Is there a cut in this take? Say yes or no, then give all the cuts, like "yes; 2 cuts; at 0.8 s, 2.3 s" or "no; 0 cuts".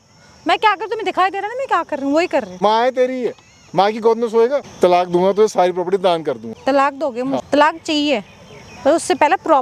yes; 4 cuts; at 2.5 s, 4.7 s, 6.5 s, 7.4 s